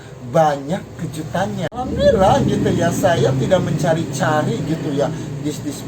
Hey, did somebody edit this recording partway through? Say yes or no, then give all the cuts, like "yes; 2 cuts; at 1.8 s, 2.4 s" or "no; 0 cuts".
yes; 1 cut; at 1.7 s